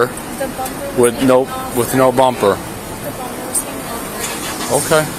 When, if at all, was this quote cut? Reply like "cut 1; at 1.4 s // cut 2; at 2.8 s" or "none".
none